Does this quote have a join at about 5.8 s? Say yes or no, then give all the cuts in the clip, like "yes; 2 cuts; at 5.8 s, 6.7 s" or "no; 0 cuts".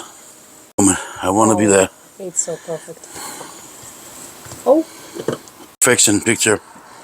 yes; 2 cuts; at 0.8 s, 5.8 s